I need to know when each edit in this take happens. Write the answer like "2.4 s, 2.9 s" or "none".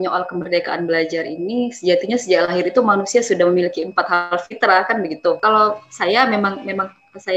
5.4 s